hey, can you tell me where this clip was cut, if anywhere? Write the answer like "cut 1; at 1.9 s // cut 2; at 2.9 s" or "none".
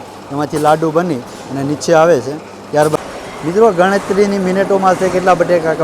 cut 1; at 3.0 s